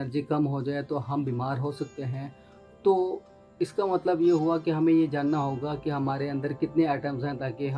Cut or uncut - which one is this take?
uncut